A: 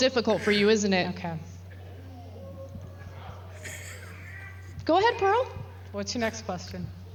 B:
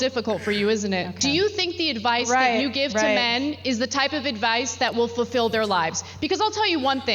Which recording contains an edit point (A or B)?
B